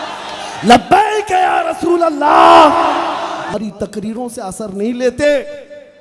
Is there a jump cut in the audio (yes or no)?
yes